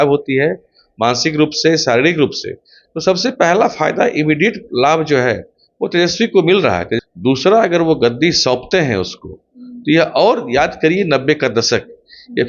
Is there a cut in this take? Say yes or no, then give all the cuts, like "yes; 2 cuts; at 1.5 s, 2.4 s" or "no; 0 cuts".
yes; 1 cut; at 7.0 s